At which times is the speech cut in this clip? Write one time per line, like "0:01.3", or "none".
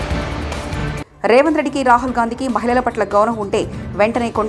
0:01.1